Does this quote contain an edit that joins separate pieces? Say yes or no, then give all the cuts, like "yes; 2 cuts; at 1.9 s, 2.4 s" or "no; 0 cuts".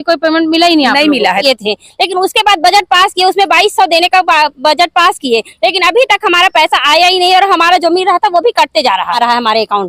yes; 2 cuts; at 1.4 s, 9.2 s